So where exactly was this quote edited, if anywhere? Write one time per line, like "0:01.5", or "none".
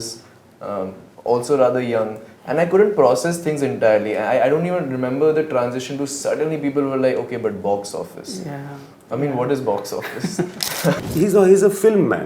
0:11.0